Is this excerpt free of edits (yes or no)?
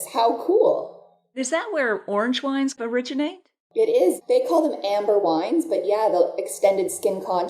no